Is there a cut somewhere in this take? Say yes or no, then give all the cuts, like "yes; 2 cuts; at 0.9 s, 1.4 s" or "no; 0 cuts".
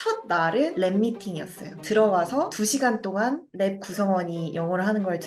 no; 0 cuts